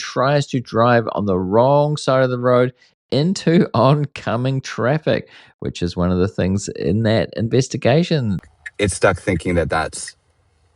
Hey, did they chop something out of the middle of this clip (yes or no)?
yes